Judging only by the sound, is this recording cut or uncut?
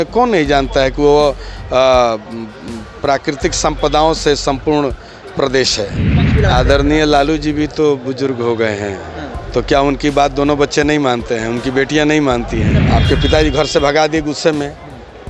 cut